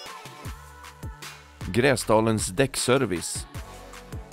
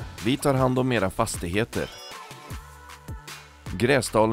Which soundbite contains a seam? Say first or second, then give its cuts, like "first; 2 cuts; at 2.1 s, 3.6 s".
first; 1 cut; at 3.2 s